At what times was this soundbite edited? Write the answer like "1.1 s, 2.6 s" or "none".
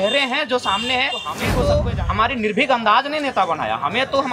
1.5 s

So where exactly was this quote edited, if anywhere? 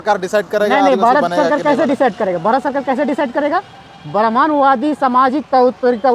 none

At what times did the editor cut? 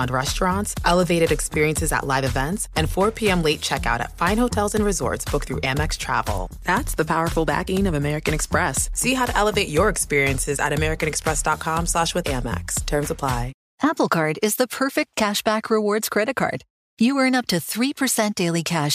13.6 s

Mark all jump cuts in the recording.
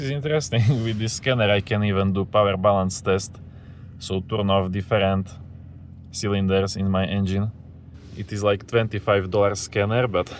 none

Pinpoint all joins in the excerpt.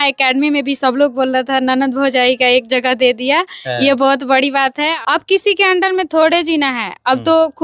4.9 s

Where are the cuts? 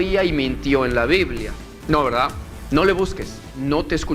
1.7 s, 2.5 s

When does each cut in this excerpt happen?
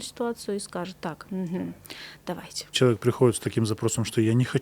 2.8 s

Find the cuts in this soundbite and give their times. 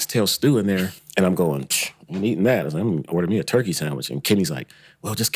0.9 s

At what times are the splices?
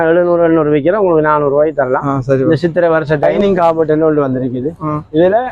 3.3 s

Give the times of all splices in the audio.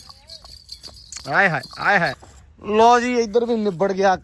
2.2 s

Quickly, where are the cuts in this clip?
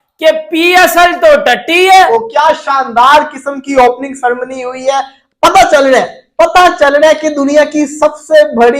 2.1 s

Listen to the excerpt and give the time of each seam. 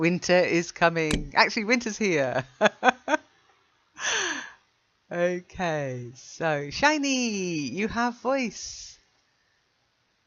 none

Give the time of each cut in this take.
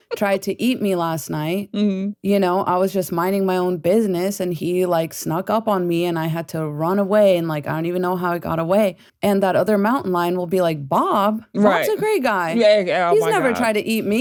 none

